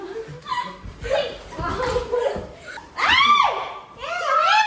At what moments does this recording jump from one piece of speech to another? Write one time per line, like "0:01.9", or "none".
0:02.6